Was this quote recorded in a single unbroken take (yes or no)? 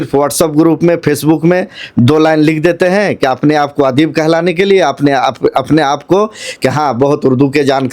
yes